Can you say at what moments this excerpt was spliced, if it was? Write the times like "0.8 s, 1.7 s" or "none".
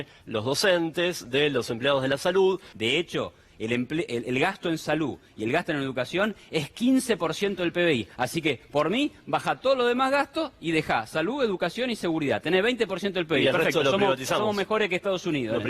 2.7 s